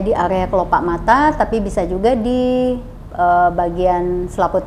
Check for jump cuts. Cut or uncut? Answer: uncut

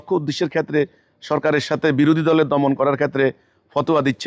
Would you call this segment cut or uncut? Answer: uncut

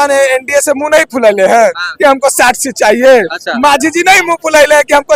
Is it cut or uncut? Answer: uncut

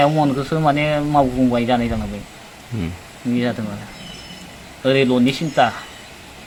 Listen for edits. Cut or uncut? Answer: uncut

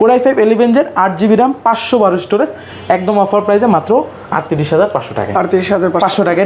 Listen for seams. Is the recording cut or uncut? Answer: uncut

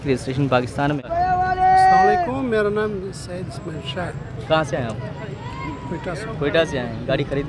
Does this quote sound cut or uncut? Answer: cut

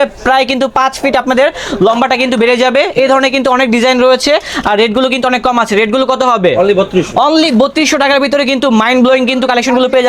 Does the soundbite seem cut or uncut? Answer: uncut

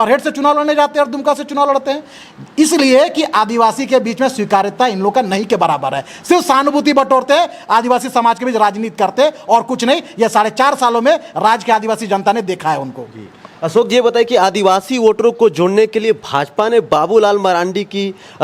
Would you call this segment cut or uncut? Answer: uncut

